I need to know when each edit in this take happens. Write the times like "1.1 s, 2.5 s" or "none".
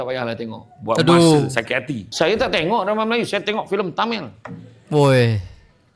2.0 s